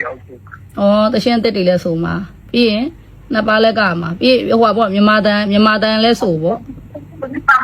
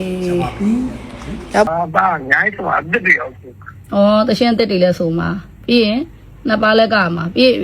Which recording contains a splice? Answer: second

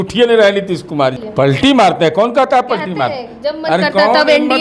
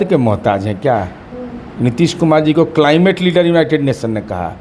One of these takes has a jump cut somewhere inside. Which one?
first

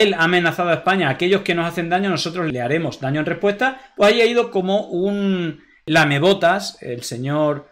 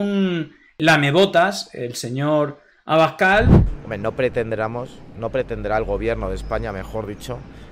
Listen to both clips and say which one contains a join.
second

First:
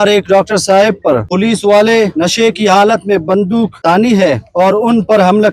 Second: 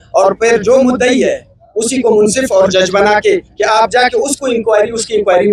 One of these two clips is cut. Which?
first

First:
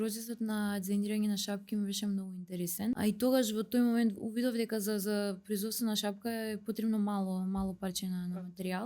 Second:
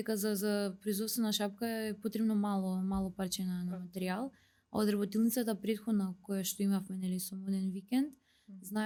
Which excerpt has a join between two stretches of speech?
first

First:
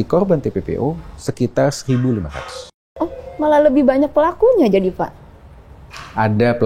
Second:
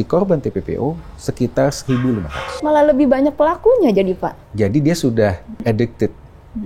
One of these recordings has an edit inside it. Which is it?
second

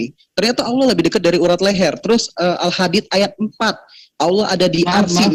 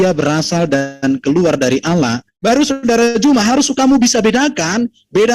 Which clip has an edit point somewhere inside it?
second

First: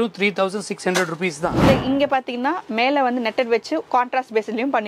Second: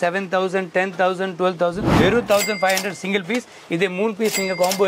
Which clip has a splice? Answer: first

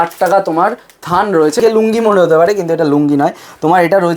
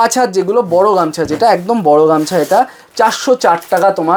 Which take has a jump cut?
first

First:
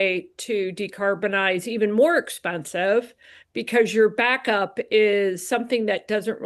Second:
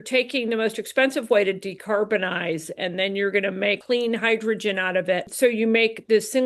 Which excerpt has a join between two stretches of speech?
second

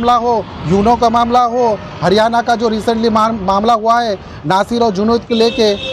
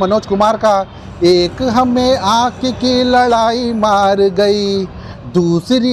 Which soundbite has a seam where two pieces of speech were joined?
second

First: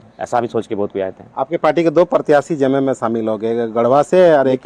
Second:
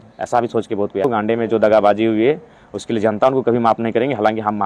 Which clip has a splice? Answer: second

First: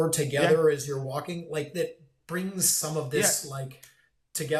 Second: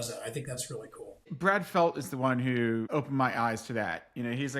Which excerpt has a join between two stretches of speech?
second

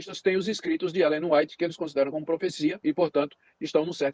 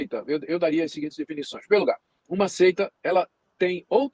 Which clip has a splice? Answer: first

